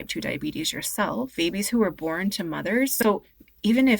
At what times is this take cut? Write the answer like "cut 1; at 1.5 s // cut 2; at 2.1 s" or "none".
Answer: cut 1; at 1.3 s